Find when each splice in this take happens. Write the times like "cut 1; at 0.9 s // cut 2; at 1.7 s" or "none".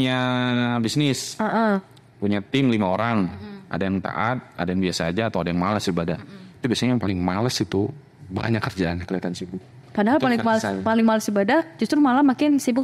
none

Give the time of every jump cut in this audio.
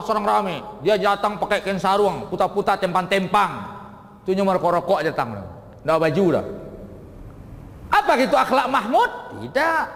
none

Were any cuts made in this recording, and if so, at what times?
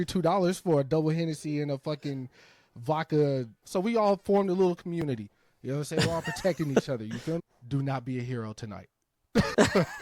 cut 1; at 3.6 s // cut 2; at 7.4 s

